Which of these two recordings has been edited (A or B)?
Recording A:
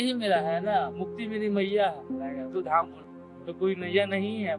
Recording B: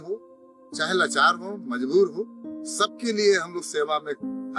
A